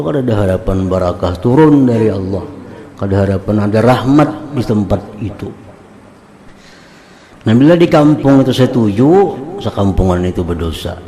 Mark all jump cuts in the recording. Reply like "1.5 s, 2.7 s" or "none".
6.6 s